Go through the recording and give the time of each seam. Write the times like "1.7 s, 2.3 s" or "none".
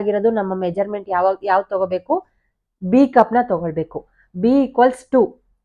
none